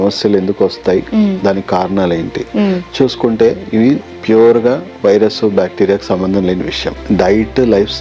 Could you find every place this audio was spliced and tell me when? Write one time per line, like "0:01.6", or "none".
0:07.0